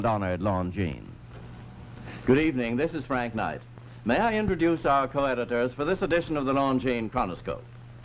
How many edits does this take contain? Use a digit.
1